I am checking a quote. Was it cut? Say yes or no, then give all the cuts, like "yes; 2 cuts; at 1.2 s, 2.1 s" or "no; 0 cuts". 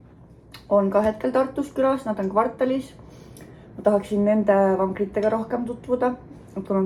no; 0 cuts